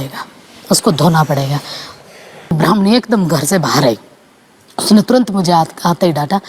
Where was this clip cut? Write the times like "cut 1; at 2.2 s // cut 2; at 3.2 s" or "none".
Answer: cut 1; at 2.5 s